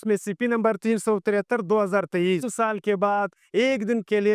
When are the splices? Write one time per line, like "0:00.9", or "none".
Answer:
0:02.5